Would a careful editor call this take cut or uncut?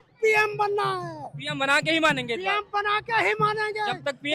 uncut